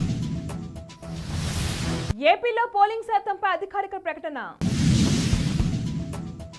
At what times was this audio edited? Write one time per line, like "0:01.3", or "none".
none